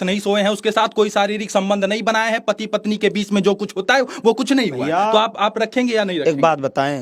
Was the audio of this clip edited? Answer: no; 0 cuts

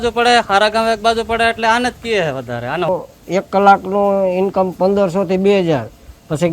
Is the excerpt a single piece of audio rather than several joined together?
no; 1 cut; at 2.9 s

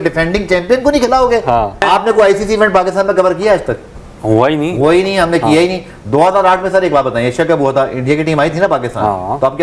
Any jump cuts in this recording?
no; 0 cuts

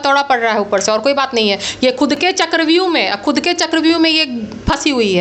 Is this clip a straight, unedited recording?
yes; 0 cuts

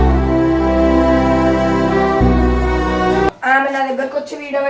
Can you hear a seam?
yes; 1 cut; at 3.4 s

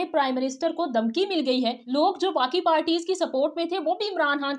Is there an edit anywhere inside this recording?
yes; 1 cut; at 1.8 s

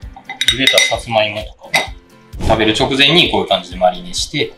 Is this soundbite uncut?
no; 1 cut; at 2.4 s

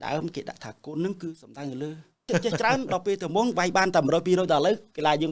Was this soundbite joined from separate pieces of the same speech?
yes; 1 cut; at 2.2 s

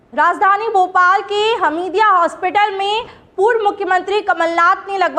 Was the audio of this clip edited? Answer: no; 0 cuts

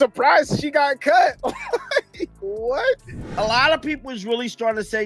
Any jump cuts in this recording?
yes; 1 cut; at 3.2 s

